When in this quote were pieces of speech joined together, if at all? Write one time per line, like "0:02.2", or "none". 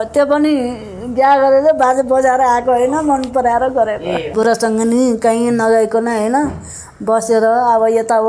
0:04.3